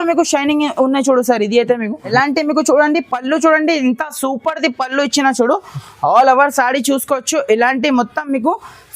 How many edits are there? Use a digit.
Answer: 1